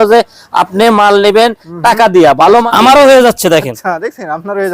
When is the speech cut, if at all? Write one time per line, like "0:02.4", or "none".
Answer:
0:02.7